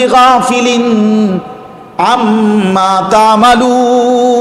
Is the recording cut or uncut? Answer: uncut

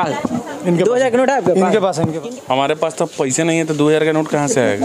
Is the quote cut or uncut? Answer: cut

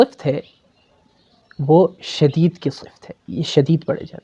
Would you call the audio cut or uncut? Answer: uncut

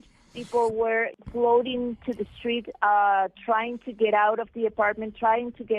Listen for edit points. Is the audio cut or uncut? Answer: cut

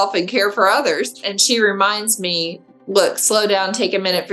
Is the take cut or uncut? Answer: cut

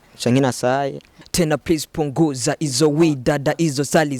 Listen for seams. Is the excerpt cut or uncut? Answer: cut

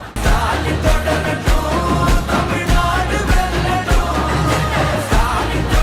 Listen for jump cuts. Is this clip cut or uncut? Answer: uncut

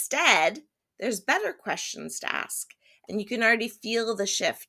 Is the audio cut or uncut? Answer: uncut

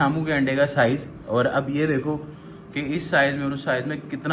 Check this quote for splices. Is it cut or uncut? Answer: uncut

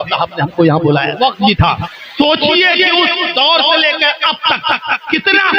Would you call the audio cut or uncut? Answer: cut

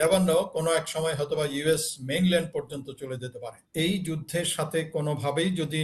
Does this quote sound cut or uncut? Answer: cut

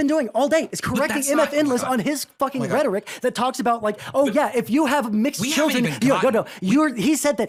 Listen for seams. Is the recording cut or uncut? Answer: uncut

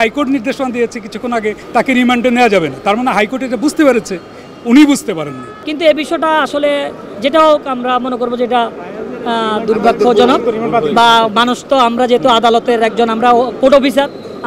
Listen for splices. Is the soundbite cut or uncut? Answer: cut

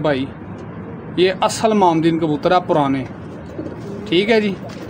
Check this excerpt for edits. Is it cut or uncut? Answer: uncut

